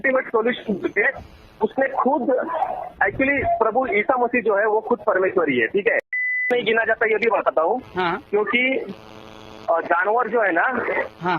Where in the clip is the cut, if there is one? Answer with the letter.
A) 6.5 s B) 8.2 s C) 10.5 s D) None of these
A